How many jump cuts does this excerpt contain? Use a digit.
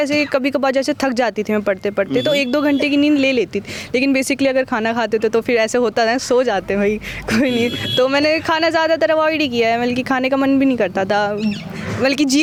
0